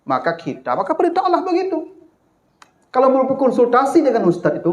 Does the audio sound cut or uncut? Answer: uncut